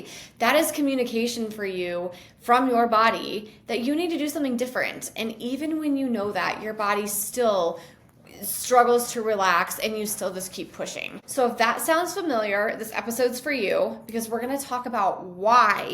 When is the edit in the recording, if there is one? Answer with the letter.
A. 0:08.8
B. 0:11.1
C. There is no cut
B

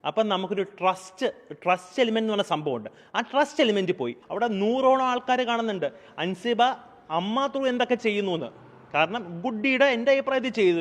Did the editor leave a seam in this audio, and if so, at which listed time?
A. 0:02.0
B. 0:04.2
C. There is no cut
B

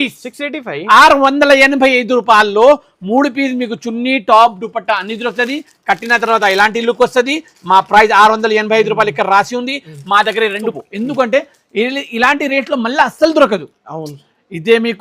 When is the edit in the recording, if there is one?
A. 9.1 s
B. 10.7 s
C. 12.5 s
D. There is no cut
B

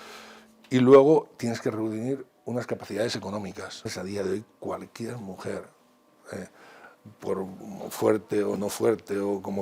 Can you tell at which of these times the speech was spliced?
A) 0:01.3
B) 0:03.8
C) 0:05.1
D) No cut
B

